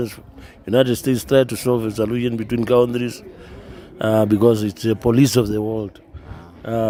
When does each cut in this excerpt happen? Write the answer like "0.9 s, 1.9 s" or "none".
none